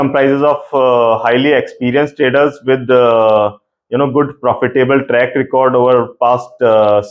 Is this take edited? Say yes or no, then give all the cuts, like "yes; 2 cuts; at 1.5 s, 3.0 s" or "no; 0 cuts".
no; 0 cuts